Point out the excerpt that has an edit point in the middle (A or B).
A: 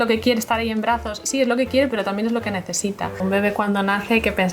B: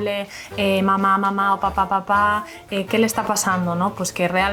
A